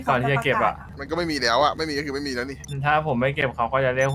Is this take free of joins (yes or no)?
no